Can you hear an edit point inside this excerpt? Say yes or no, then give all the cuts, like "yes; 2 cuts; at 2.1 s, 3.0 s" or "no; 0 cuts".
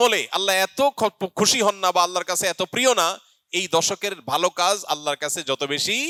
no; 0 cuts